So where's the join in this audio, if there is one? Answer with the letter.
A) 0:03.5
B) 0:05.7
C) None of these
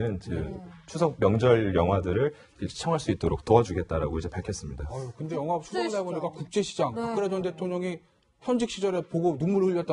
C